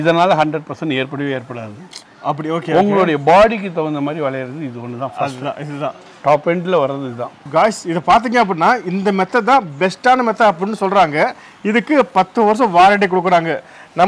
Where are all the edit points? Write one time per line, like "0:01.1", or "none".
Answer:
0:07.4